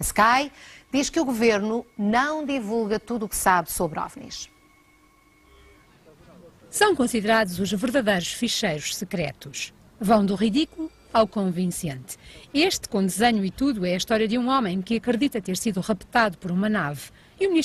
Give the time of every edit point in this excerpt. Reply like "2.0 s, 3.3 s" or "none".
none